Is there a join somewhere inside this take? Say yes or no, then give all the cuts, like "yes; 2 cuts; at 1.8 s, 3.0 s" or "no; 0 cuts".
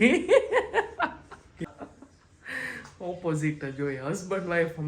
yes; 1 cut; at 1.7 s